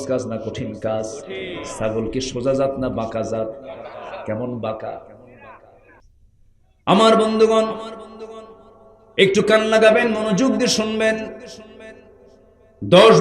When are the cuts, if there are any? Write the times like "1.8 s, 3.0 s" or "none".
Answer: 6.1 s